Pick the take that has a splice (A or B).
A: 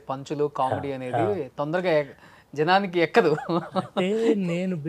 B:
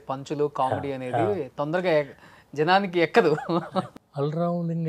B